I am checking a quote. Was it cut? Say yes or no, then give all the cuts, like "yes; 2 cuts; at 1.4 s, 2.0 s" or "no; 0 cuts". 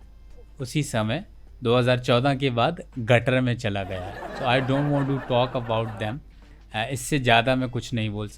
no; 0 cuts